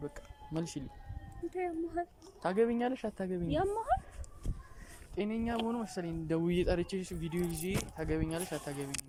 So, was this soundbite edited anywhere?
no; 0 cuts

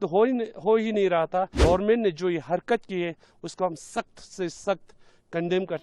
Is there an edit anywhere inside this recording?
yes; 1 cut; at 1.5 s

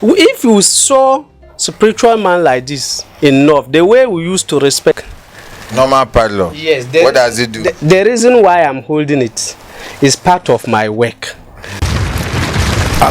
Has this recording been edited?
yes; 2 cuts; at 5.0 s, 11.8 s

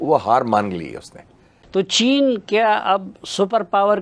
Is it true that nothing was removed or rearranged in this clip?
no; 1 cut; at 1.6 s

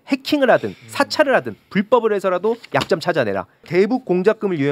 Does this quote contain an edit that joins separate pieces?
yes; 1 cut; at 3.7 s

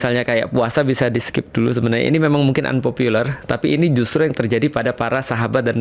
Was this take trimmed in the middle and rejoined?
no; 0 cuts

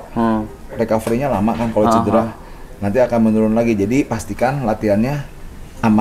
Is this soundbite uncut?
yes; 0 cuts

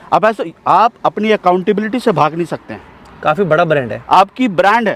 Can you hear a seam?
no; 0 cuts

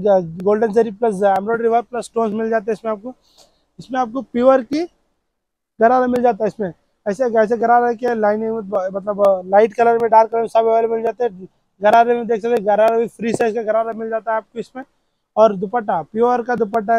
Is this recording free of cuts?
yes; 0 cuts

